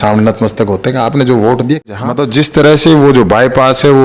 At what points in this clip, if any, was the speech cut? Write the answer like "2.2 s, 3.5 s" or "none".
1.9 s